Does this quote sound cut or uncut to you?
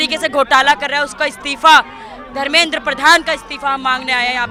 uncut